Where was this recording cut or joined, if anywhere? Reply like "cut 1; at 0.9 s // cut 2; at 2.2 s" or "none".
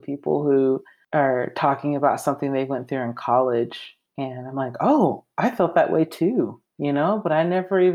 cut 1; at 0.9 s